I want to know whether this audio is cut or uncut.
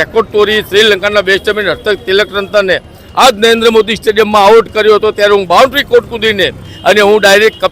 cut